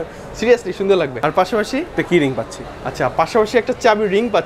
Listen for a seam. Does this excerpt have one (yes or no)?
no